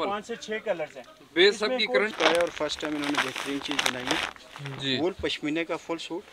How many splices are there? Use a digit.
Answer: 1